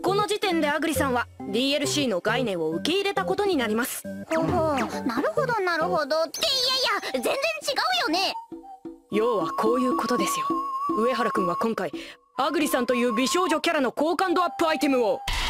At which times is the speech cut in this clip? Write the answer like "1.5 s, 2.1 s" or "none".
0.9 s